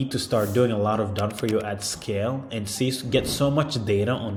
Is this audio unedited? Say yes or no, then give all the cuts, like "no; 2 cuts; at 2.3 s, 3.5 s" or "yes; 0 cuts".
yes; 0 cuts